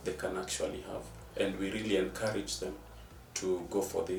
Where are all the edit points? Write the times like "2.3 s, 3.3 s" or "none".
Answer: none